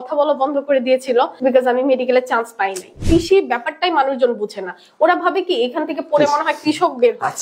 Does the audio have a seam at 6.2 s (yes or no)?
no